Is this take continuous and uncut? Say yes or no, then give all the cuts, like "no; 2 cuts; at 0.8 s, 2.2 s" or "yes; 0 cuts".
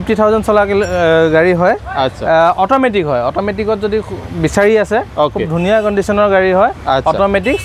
yes; 0 cuts